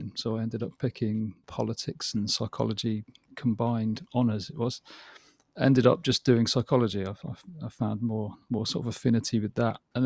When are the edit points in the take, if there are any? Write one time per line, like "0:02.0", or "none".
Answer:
none

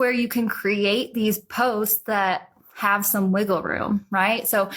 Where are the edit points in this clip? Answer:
none

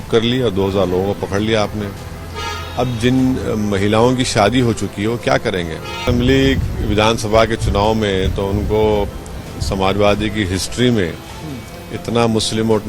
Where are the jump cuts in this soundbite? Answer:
0:06.0

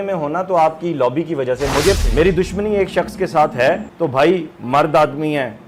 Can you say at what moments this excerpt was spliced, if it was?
0:02.0
0:03.9

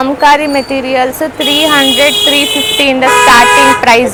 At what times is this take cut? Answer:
none

